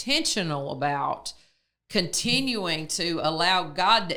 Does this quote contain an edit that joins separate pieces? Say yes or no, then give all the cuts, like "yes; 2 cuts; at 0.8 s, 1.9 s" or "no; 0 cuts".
no; 0 cuts